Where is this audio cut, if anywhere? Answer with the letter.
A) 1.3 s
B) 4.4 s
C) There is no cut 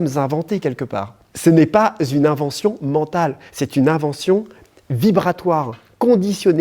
A